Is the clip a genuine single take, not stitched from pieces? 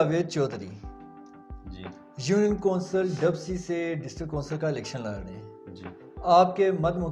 yes; 0 cuts

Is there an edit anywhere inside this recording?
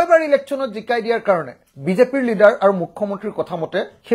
no; 0 cuts

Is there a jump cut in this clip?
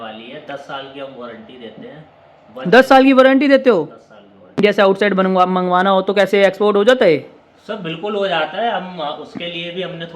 yes; 1 cut; at 4.6 s

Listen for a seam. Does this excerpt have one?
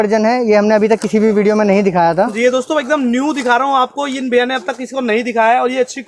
no; 0 cuts

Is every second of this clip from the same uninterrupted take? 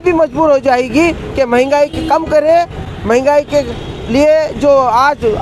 yes; 0 cuts

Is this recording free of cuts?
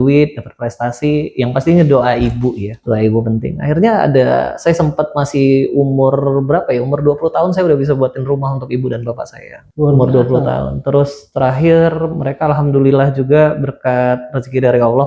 no; 2 cuts; at 2.7 s, 9.6 s

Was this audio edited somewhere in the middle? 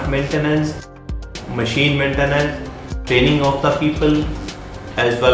yes; 2 cuts; at 0.9 s, 3.0 s

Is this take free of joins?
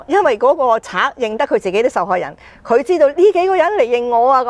yes; 0 cuts

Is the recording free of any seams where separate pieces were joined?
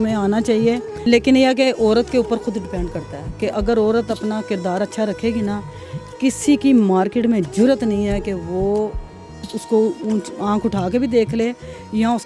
no; 1 cut; at 0.9 s

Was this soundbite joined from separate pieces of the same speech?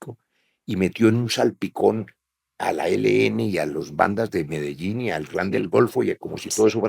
no; 0 cuts

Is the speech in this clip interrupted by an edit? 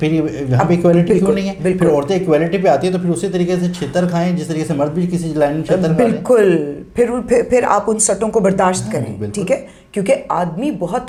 no; 0 cuts

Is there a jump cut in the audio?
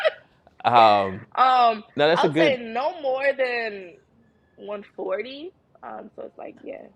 no; 0 cuts

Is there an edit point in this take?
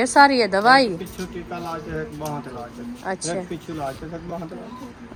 no; 0 cuts

